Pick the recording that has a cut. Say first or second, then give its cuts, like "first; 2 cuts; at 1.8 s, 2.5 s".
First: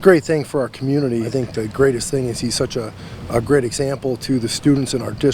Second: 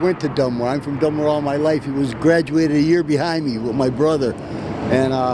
first; 1 cut; at 1.3 s